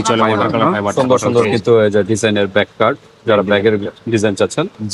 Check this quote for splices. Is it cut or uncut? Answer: cut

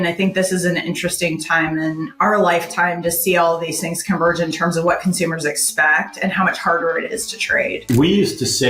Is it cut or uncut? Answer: cut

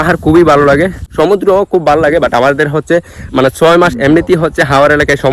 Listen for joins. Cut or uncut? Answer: cut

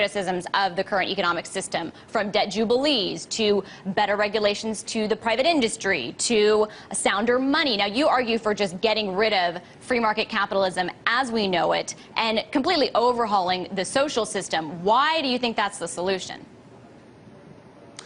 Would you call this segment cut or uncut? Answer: cut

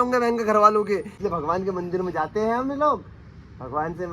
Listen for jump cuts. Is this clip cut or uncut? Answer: cut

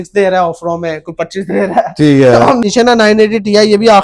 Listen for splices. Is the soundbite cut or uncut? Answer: cut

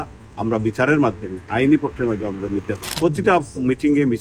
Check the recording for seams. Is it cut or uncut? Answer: cut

